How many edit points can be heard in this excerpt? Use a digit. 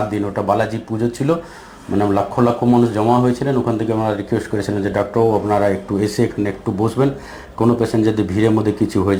0